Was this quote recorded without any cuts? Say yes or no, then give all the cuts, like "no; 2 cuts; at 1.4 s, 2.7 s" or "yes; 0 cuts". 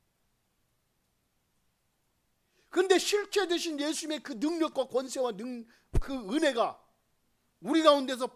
yes; 0 cuts